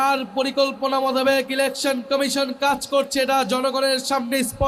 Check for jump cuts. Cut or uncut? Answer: uncut